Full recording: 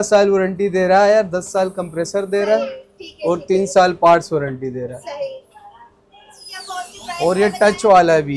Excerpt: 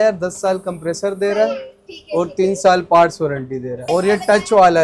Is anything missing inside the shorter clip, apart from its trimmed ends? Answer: yes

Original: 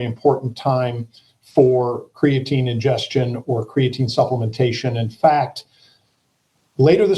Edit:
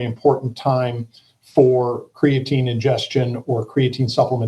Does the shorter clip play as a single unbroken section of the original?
yes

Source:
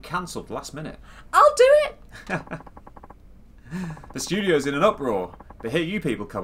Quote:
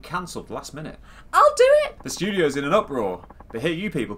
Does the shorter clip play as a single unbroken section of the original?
no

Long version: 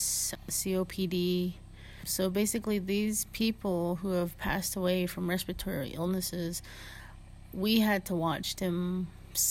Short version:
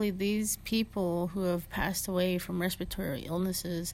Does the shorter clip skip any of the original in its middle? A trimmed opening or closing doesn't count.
no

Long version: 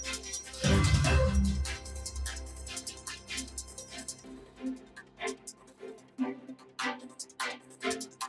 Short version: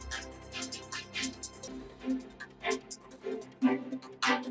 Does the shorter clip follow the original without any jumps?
no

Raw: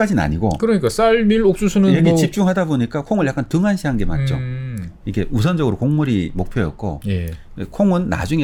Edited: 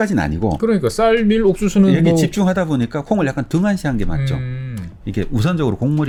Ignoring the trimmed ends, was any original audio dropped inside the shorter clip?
no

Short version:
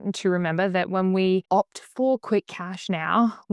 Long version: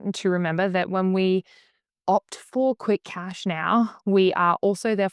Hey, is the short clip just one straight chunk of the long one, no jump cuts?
no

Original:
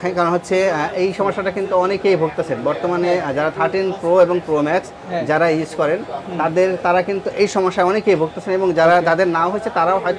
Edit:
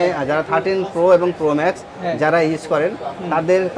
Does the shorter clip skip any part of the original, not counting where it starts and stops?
no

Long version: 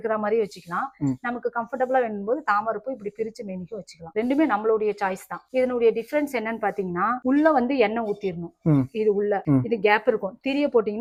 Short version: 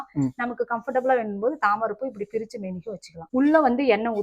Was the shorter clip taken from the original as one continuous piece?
no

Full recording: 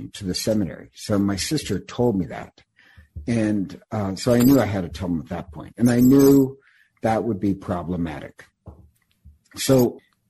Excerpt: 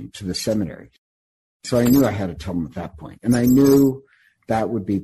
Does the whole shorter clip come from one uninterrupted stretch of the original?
no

